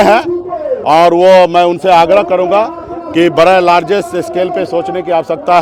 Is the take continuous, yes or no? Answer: yes